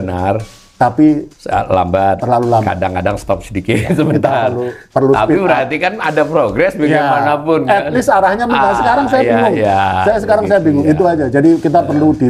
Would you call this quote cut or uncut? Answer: uncut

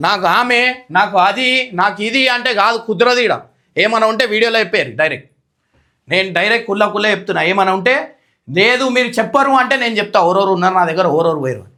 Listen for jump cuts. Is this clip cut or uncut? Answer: uncut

